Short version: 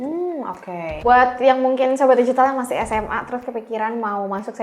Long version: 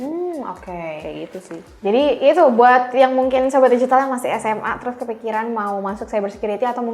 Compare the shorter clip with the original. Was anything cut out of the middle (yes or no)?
yes